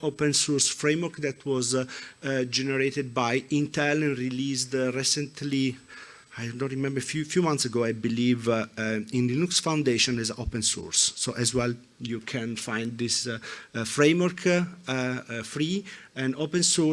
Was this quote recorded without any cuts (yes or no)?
yes